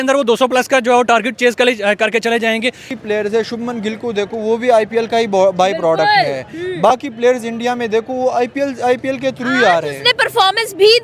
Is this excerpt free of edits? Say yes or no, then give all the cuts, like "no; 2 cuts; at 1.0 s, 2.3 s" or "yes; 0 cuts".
no; 1 cut; at 2.9 s